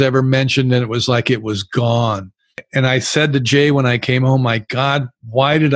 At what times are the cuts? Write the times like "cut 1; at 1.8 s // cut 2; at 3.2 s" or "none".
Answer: cut 1; at 2.6 s